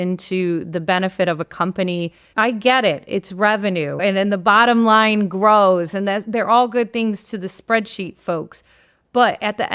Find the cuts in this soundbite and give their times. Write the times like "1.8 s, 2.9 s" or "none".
2.2 s, 4.0 s

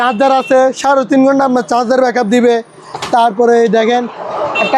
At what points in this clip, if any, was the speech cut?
none

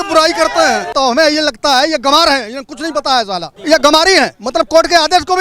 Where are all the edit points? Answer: 0.9 s, 3.5 s

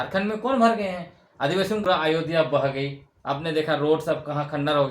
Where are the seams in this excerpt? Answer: 1.8 s

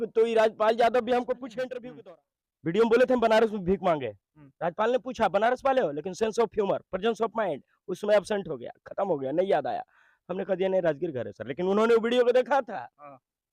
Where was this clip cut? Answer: 1.9 s

